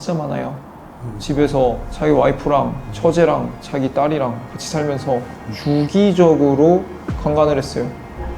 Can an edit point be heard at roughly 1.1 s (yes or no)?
yes